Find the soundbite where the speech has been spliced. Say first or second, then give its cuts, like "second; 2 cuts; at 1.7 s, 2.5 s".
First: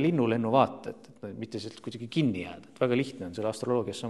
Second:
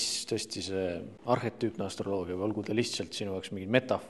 second; 1 cut; at 1.1 s